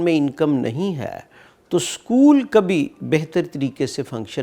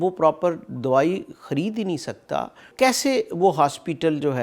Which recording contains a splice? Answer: second; 1 cut; at 2.7 s

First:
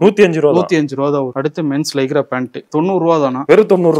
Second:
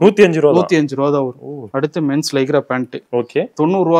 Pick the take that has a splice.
first; 2 cuts; at 1.3 s, 2.6 s

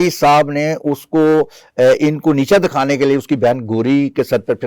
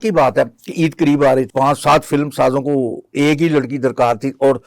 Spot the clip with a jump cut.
second; 1 cut; at 1.5 s

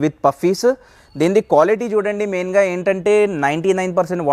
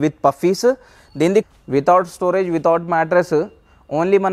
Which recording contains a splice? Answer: second; 1 cut; at 1.5 s

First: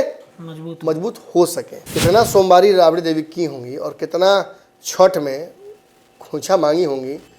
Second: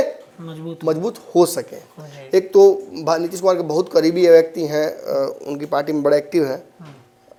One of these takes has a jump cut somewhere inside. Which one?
first; 1 cut; at 1.7 s

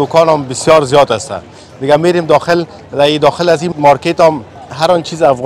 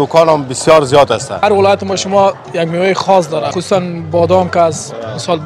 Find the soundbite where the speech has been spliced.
second; 2 cuts; at 1.4 s, 3.5 s

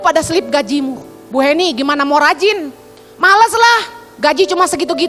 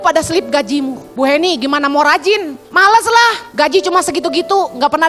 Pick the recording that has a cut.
second; 3 cuts; at 1.0 s, 2.6 s, 3.4 s

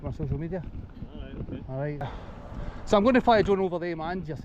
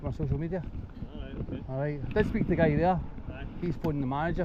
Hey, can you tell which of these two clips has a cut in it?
first; 1 cut; at 2.1 s

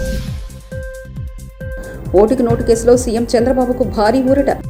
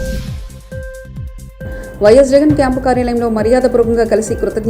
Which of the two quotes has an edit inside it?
second; 1 cut; at 1.5 s

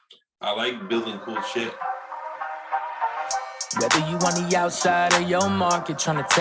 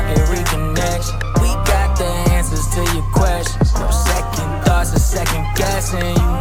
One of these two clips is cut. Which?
first; 1 cut; at 1.7 s

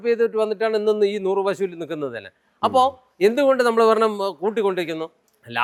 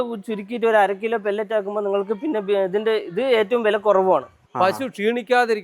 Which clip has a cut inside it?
second; 1 cut; at 4.4 s

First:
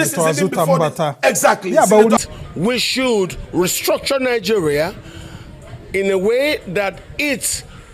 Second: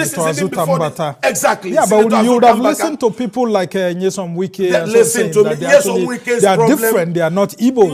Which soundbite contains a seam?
first; 1 cut; at 2.2 s

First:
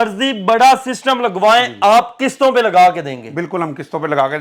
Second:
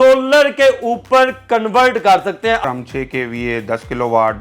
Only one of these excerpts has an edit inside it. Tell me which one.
second; 1 cut; at 2.6 s

